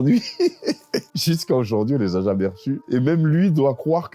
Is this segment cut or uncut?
cut